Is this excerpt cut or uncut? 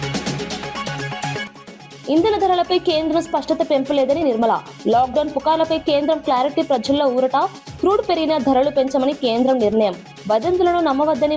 cut